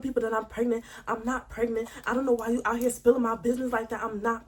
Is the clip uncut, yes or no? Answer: yes